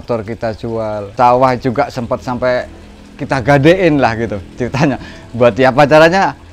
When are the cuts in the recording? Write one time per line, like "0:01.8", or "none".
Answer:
0:01.1